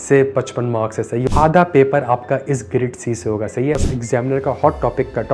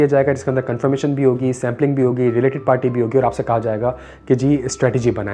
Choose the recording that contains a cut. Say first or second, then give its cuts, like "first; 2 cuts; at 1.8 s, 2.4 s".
first; 2 cuts; at 1.2 s, 3.9 s